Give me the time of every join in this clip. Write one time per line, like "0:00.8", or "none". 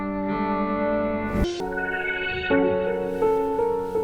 0:01.4